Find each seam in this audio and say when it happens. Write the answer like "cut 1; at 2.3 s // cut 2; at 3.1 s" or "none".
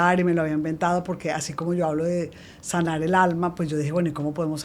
none